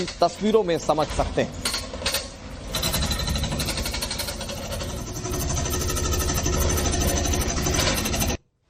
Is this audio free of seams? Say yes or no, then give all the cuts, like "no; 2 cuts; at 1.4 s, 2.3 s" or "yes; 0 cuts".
yes; 0 cuts